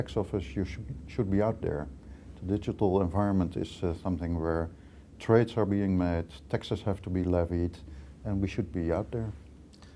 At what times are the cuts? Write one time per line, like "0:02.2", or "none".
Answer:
none